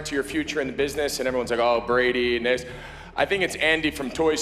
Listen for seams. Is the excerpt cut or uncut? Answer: uncut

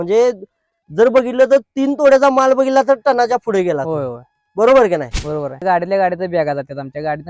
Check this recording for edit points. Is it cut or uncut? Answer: uncut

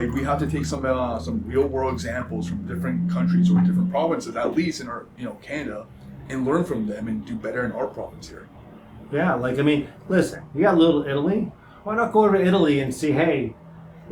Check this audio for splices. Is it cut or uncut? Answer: uncut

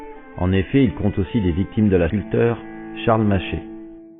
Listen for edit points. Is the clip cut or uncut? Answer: uncut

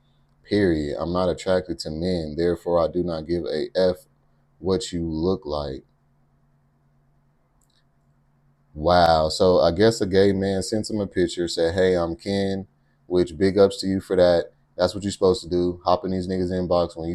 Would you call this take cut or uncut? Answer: uncut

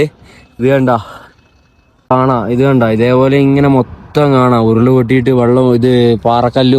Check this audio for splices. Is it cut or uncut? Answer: cut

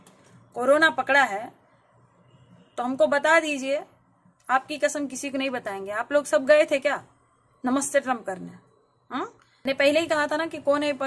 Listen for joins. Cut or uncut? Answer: cut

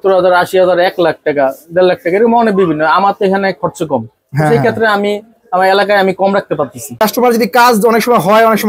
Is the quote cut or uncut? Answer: cut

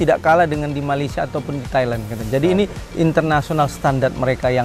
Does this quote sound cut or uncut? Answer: uncut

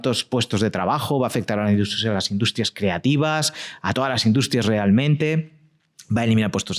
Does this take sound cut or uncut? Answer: uncut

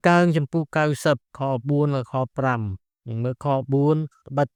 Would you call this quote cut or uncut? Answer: uncut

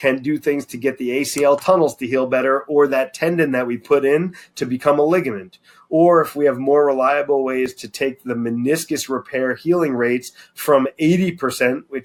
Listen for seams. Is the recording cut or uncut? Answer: uncut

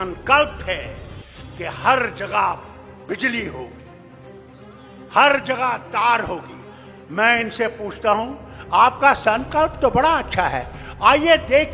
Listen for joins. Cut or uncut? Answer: uncut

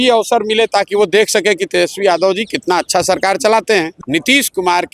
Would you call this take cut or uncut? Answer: cut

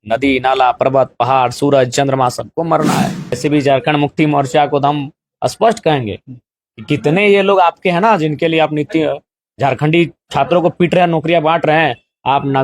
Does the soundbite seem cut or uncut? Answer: cut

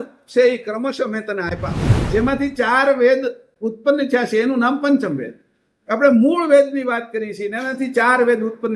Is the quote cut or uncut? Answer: cut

